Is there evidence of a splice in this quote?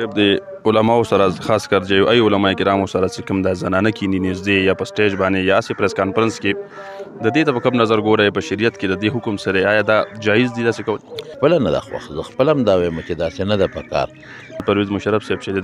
yes; 2 cuts; at 11.3 s, 14.6 s

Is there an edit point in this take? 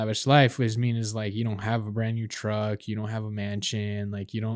no; 0 cuts

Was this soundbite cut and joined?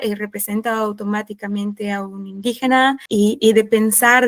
yes; 1 cut; at 3.0 s

